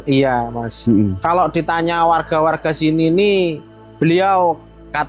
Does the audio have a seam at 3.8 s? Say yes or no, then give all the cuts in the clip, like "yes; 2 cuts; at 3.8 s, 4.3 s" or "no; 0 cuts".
no; 1 cut; at 1.2 s